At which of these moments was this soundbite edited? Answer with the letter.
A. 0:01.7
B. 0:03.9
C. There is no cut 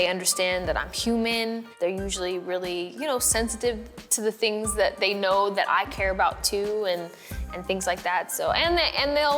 A